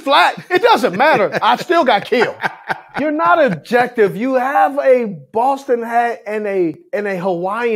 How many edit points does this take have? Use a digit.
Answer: 2